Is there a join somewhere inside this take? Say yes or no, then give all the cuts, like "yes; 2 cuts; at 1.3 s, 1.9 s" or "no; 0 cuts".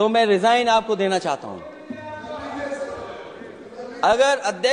no; 0 cuts